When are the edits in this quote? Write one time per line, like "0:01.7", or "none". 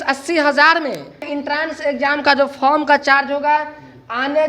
0:01.3